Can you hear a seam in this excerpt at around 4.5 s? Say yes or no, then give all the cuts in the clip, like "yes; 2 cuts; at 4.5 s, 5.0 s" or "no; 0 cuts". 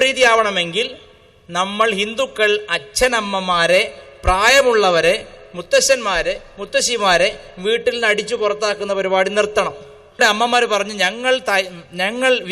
no; 1 cut; at 10.2 s